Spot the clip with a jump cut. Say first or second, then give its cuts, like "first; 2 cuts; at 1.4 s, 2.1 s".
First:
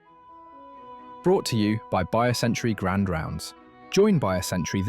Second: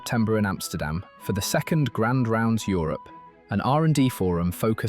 first; 1 cut; at 1.2 s